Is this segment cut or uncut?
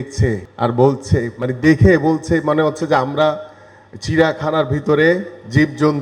uncut